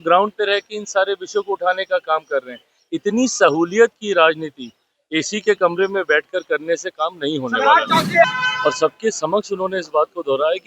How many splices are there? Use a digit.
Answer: 1